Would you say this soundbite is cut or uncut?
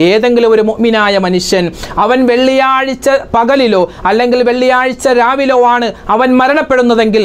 uncut